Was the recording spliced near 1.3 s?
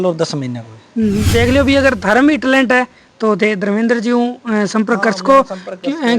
yes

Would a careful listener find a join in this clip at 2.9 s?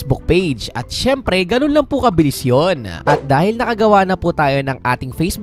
yes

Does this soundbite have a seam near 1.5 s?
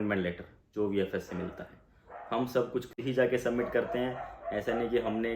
no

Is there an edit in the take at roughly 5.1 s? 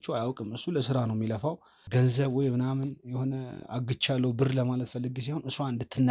no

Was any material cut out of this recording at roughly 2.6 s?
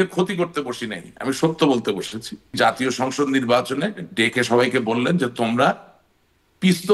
yes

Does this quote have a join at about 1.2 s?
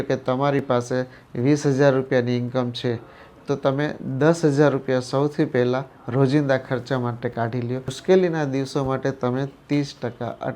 no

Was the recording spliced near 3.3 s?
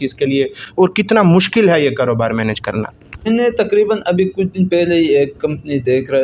yes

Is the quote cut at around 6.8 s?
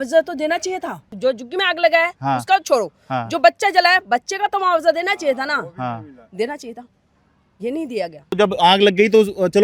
no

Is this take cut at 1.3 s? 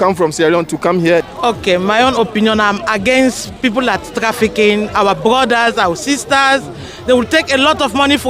yes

